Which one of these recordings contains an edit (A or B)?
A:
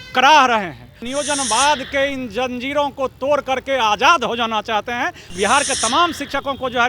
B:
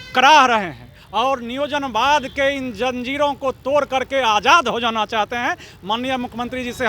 A